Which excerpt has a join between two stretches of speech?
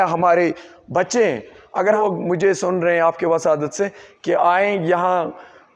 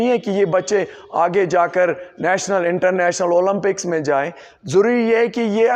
first; 1 cut; at 2.0 s

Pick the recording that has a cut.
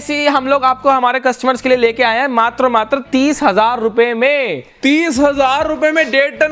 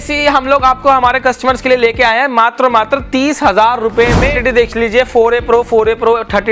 second; 1 cut; at 4.3 s

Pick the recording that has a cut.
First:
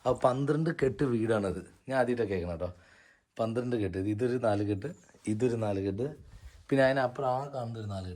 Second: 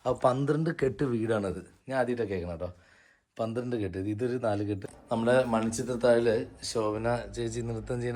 second; 1 cut; at 4.9 s

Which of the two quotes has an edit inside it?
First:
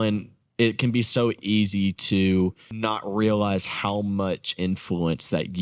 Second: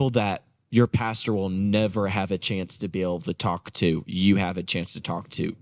first; 1 cut; at 2.8 s

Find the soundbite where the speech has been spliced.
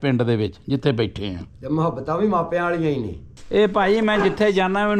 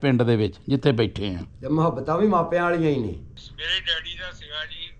first; 1 cut; at 3.5 s

